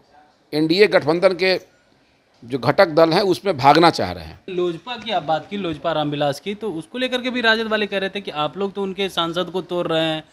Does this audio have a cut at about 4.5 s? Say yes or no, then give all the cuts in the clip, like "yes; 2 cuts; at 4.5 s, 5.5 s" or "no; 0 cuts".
yes; 1 cut; at 4.5 s